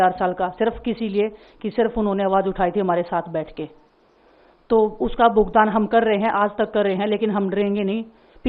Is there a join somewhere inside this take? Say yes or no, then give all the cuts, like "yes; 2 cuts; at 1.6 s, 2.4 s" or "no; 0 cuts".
no; 0 cuts